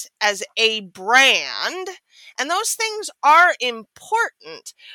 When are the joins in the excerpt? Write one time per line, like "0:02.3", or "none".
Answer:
none